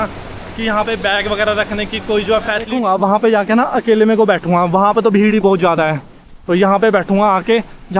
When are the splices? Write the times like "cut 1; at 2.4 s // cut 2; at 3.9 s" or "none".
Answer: cut 1; at 2.7 s